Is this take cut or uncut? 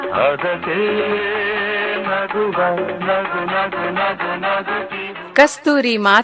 uncut